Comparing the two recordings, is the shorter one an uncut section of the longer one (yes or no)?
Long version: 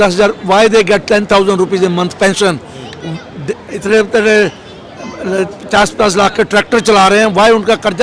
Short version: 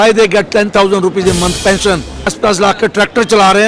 no